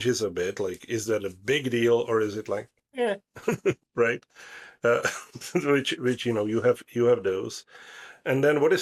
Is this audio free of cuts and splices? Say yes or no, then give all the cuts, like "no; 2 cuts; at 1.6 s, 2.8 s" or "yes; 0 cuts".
yes; 0 cuts